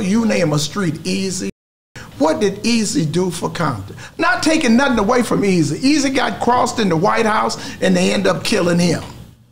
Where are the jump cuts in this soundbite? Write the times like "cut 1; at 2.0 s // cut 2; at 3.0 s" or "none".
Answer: cut 1; at 2.0 s